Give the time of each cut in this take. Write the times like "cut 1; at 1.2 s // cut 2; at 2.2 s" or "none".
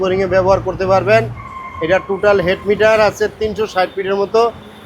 none